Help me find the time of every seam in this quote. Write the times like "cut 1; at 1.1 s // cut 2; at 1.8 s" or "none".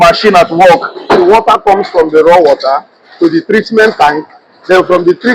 cut 1; at 1.2 s

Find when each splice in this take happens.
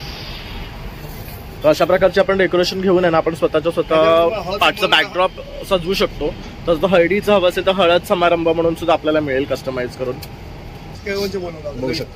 cut 1; at 11.0 s

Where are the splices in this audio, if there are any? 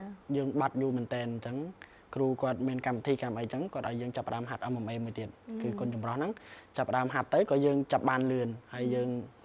none

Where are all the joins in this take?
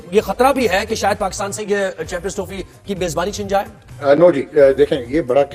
cut 1; at 3.8 s

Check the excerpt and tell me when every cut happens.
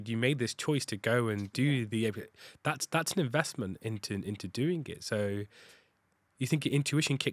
none

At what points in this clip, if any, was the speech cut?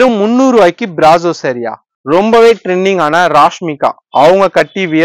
cut 1; at 1.9 s

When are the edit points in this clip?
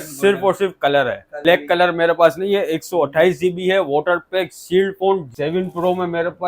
cut 1; at 1.4 s // cut 2; at 5.3 s

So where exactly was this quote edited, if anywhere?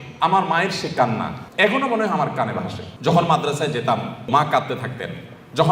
cut 1; at 1.4 s // cut 2; at 2.8 s // cut 3; at 4.3 s

